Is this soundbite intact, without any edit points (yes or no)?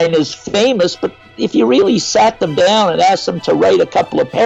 yes